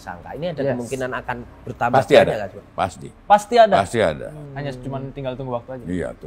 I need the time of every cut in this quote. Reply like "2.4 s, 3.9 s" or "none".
4.4 s